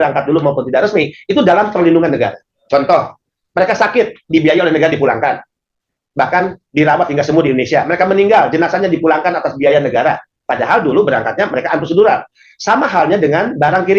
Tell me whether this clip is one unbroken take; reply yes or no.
no